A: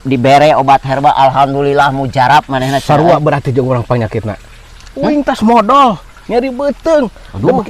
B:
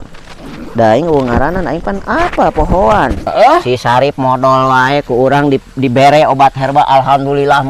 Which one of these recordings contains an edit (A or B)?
B